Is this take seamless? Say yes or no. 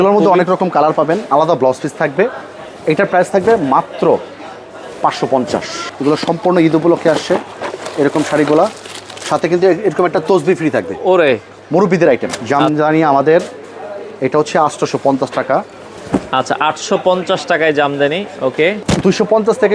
no